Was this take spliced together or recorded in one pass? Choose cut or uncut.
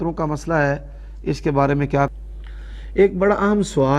cut